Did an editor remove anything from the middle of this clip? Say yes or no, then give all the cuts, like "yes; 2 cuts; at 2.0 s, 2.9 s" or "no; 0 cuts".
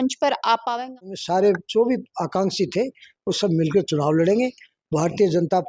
yes; 1 cut; at 1.2 s